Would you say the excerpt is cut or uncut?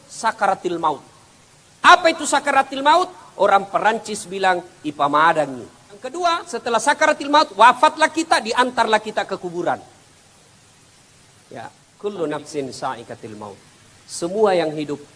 cut